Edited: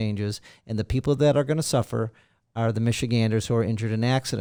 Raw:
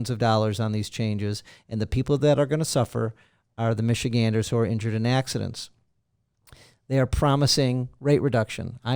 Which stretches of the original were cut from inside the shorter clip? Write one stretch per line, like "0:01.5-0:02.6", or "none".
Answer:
none